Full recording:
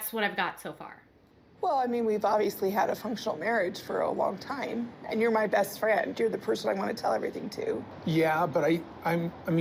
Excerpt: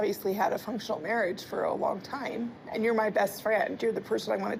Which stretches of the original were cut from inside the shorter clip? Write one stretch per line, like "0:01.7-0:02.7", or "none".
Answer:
none